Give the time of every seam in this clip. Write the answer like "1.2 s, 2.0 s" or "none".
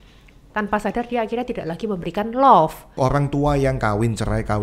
3.0 s